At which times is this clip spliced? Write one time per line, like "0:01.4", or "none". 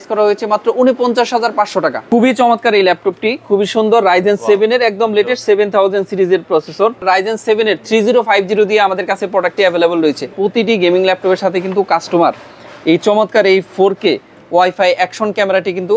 0:02.0
0:07.0
0:10.3